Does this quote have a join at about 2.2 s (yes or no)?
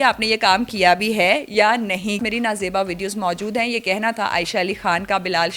yes